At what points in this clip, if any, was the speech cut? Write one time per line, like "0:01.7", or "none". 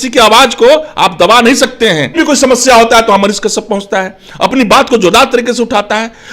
0:02.2